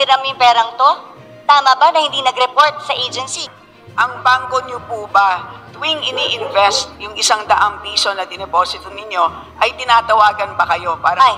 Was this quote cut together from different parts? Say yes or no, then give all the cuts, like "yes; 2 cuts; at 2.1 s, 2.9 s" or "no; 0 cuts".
yes; 1 cut; at 3.4 s